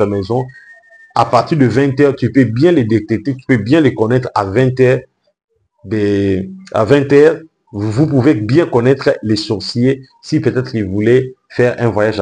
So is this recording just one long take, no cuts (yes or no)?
yes